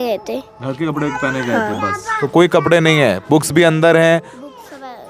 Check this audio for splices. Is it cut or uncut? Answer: uncut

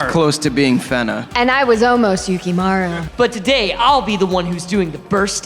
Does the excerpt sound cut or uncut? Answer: cut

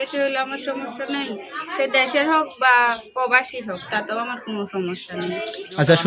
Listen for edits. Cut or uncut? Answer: uncut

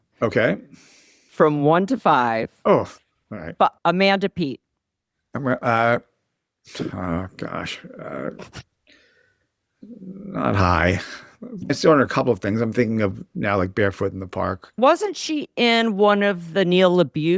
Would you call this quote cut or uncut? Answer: cut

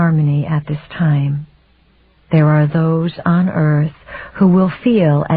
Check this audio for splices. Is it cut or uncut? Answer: cut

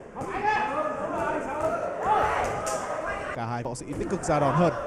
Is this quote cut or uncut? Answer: cut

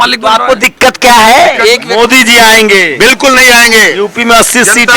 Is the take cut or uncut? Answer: cut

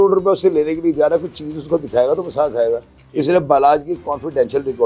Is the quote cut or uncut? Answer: uncut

